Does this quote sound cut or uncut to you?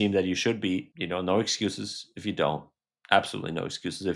cut